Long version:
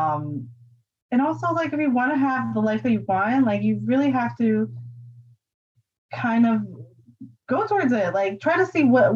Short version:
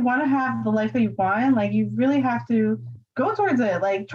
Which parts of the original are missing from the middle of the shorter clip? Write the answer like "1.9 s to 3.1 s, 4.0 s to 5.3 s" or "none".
4.9 s to 7.3 s